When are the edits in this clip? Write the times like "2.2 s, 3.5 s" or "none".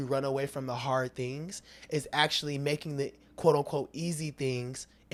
none

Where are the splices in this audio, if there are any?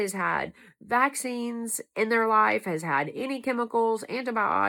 none

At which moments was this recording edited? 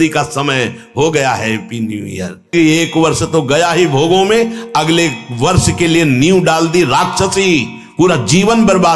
2.5 s

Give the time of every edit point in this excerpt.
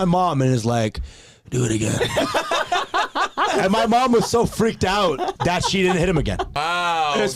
3.5 s, 5.3 s, 6.6 s

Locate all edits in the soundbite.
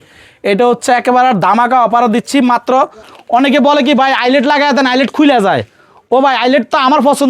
3.1 s

